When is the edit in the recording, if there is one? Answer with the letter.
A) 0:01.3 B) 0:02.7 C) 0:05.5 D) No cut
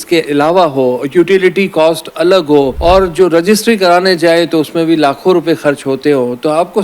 B